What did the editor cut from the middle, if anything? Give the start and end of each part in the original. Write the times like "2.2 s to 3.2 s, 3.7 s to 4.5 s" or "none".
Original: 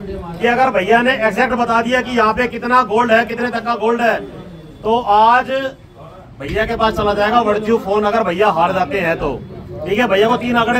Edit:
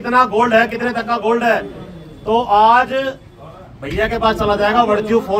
none